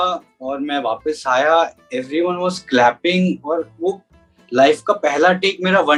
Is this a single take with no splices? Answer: yes; 0 cuts

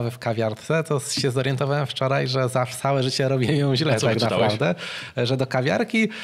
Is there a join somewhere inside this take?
no; 0 cuts

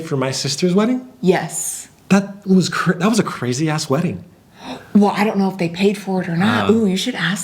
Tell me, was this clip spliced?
no; 0 cuts

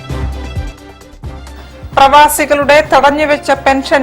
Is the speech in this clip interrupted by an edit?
yes; 1 cut; at 1.4 s

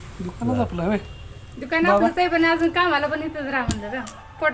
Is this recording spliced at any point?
no; 0 cuts

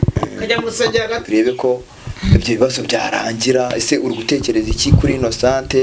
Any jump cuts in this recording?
yes; 1 cut; at 1.2 s

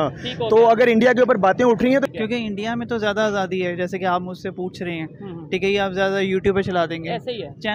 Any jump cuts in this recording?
yes; 1 cut; at 2.1 s

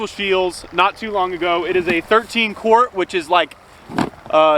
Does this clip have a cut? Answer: no; 0 cuts

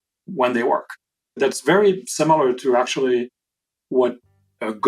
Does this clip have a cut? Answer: yes; 1 cut; at 1.4 s

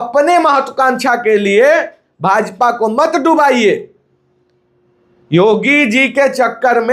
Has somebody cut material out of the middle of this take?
no; 0 cuts

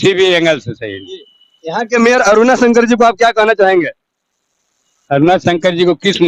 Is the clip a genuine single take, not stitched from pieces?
yes; 0 cuts

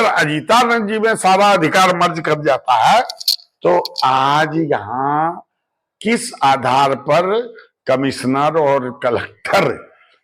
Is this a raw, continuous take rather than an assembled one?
yes; 0 cuts

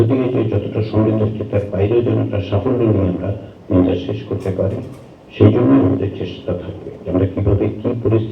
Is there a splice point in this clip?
yes; 1 cut; at 7.0 s

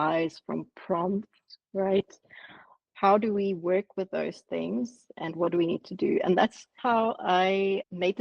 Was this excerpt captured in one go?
no; 1 cut; at 6.7 s

